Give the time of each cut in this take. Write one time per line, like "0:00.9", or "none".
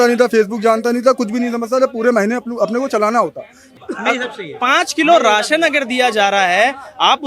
0:03.7